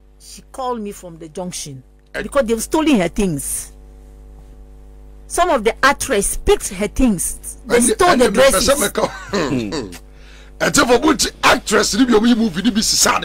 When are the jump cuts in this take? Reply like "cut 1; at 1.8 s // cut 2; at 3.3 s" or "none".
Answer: cut 1; at 2.2 s

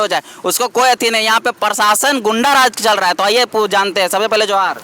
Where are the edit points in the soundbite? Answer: none

